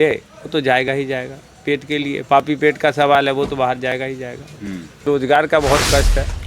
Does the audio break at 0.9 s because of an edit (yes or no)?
no